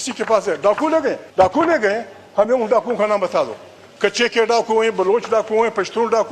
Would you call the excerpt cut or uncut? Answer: cut